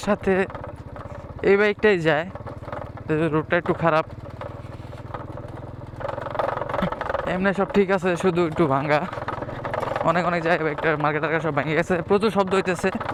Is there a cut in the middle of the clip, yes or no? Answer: no